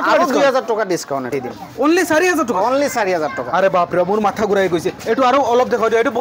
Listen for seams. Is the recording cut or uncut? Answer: cut